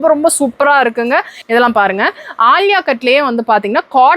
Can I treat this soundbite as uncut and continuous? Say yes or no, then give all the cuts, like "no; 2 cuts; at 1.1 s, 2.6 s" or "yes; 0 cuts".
no; 1 cut; at 1.4 s